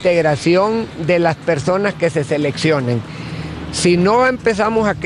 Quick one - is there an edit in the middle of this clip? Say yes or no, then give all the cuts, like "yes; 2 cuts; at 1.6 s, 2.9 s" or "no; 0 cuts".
no; 0 cuts